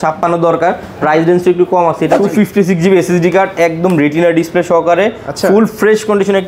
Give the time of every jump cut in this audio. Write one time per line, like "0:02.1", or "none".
0:02.2